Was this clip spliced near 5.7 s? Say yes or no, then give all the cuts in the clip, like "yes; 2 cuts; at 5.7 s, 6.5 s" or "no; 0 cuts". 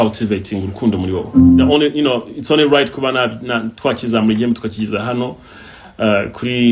no; 1 cut; at 1.7 s